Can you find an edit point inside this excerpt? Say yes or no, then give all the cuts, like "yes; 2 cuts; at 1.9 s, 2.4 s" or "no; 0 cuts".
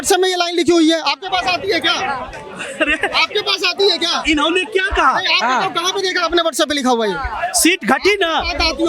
no; 0 cuts